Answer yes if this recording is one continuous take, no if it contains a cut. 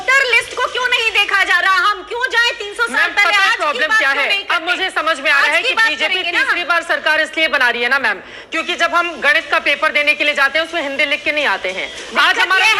yes